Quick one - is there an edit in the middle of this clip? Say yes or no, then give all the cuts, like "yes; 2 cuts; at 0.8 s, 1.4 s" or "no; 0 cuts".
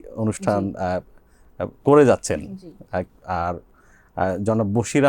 no; 0 cuts